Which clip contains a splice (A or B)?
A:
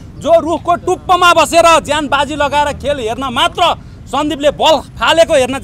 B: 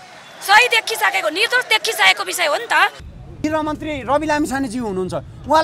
B